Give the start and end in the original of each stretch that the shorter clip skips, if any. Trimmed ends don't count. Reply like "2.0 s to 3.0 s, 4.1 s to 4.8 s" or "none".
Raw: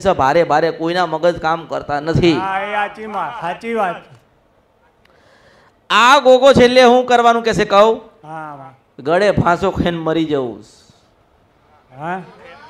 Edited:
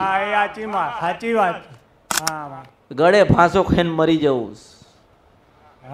4.5 s to 8.2 s